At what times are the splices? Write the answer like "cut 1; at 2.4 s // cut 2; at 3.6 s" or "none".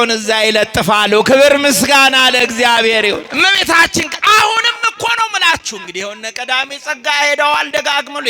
cut 1; at 3.3 s